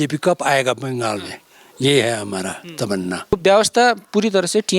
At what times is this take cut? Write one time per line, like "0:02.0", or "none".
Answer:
0:03.3